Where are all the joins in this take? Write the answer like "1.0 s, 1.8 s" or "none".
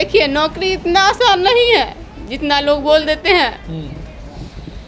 none